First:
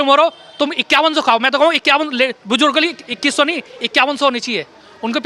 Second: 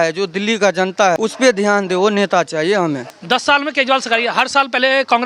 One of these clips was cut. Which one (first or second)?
second